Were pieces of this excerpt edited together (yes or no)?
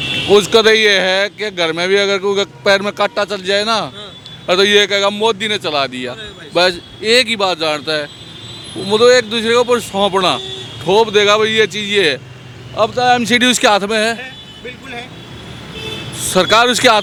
no